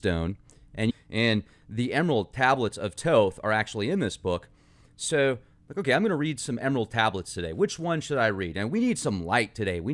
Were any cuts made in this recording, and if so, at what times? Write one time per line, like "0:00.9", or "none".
none